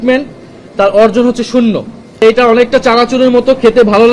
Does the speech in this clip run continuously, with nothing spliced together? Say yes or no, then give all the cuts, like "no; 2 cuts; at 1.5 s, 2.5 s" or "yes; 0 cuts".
no; 1 cut; at 2.2 s